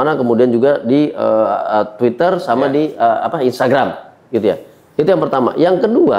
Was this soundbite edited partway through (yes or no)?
no